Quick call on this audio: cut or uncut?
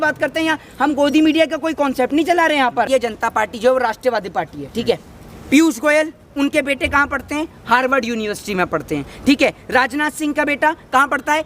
cut